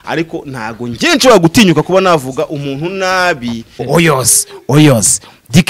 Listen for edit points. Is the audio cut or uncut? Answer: cut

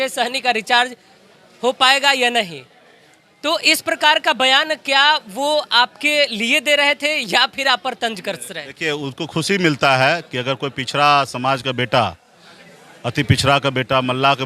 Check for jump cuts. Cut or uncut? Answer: uncut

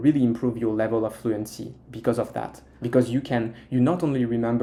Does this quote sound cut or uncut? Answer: uncut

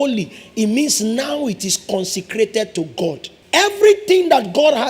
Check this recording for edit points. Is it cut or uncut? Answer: cut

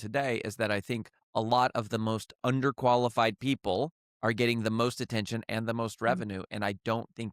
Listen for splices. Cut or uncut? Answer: cut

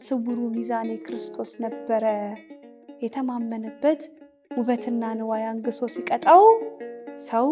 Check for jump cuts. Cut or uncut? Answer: uncut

